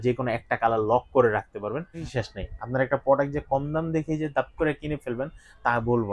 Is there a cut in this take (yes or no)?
yes